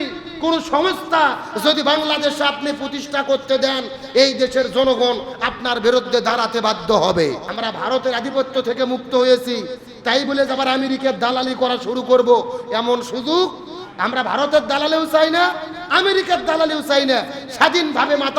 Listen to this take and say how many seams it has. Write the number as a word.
one